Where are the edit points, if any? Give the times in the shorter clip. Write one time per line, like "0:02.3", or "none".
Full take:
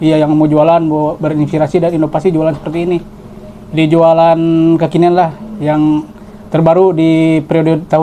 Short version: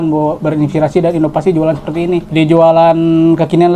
0:02.3